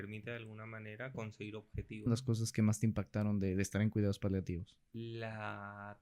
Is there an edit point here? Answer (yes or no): yes